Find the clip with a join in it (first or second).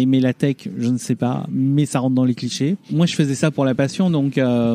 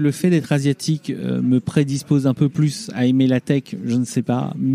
first